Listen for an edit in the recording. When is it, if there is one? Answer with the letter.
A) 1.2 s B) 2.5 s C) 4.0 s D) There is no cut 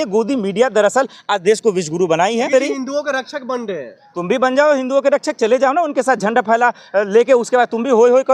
B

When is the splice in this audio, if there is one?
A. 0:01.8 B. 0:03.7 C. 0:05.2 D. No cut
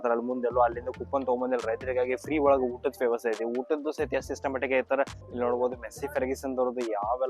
C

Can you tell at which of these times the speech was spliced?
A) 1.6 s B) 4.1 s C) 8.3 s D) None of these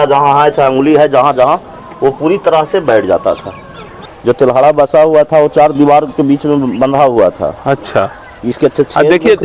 B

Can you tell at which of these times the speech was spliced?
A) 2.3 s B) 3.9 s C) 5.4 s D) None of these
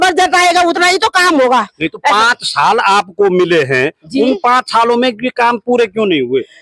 D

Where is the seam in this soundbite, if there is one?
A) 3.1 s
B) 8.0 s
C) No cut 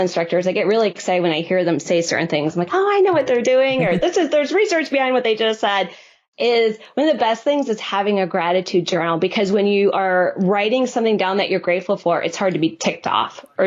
C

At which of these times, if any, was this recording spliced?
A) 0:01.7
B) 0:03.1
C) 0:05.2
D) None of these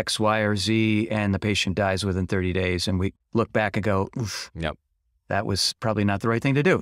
B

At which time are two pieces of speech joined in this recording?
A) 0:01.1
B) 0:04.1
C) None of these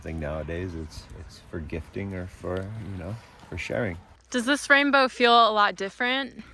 B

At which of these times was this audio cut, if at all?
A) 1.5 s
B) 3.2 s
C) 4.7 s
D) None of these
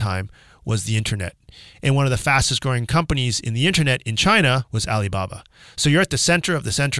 C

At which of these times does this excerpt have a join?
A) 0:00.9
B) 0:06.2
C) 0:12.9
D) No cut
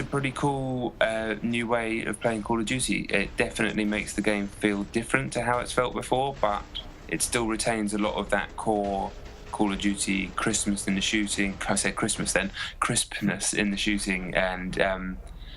C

